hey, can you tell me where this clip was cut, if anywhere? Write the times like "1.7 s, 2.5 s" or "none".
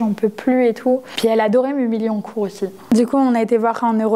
1.1 s, 2.9 s